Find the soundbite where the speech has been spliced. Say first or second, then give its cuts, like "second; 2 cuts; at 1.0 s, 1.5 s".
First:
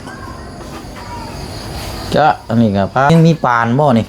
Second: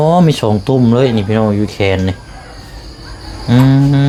first; 1 cut; at 3.1 s